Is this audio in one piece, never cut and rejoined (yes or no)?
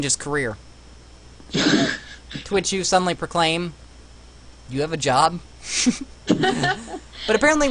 yes